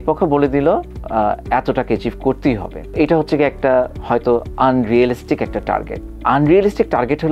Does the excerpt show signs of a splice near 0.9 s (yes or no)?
no